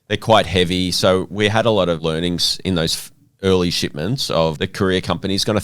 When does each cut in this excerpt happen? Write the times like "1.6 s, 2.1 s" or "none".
2.0 s, 4.6 s